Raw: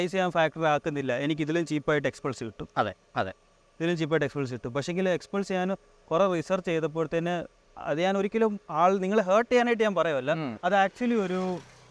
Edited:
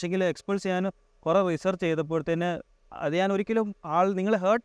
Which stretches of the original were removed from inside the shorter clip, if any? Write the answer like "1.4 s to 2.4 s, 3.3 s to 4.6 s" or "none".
none